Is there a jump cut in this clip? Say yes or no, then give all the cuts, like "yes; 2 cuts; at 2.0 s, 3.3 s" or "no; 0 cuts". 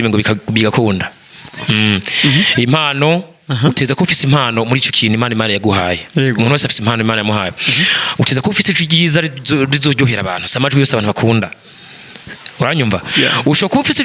no; 0 cuts